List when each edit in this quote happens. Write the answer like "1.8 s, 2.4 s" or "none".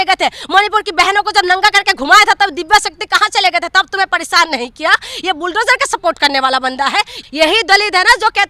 7.2 s